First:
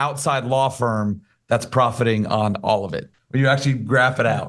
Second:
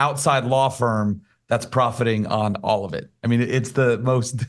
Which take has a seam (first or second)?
first